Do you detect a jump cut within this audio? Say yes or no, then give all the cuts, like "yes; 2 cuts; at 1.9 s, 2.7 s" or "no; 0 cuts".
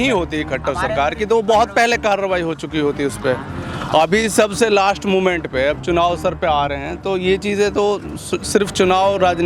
no; 0 cuts